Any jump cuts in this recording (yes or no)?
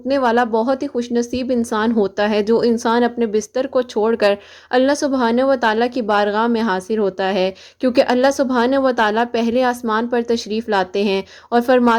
no